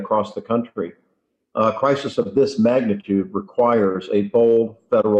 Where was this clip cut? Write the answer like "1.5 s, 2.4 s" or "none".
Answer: none

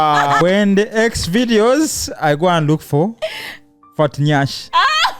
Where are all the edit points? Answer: none

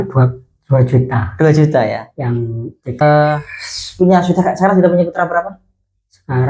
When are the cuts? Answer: 3.0 s

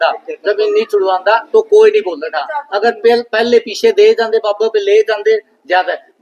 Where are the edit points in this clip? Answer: none

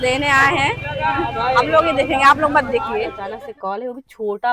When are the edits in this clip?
3.2 s

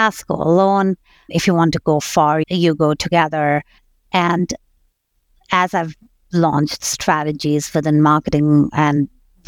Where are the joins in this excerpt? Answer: 1.3 s, 2.4 s, 3.8 s

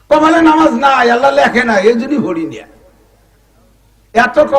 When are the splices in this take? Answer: none

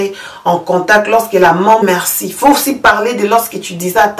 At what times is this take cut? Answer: 1.8 s

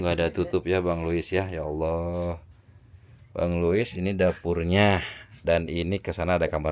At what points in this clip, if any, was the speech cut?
none

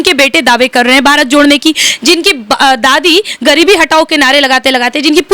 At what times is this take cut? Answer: none

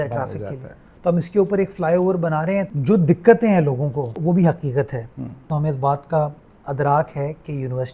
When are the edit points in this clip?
2.7 s, 4.2 s, 5.4 s

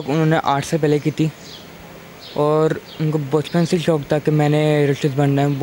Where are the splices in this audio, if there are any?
none

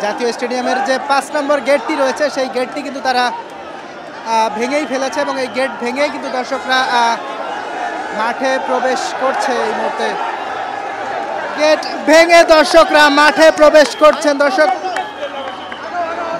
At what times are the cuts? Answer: none

